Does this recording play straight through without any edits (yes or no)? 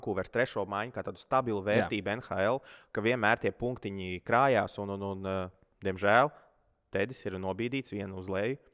yes